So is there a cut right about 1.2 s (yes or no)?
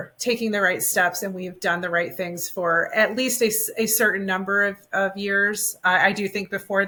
no